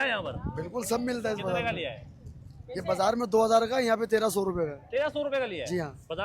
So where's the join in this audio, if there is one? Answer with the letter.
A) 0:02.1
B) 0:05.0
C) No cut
C